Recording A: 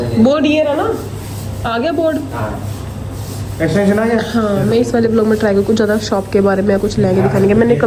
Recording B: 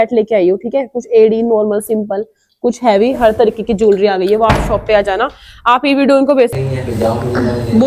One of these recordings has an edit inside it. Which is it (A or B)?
B